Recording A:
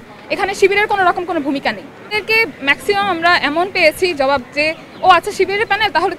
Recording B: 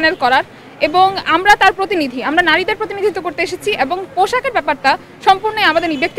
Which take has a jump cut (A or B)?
A